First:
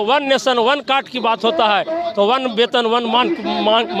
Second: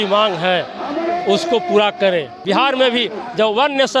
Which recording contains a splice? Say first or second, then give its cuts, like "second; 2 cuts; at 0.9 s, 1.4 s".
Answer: second; 1 cut; at 2.3 s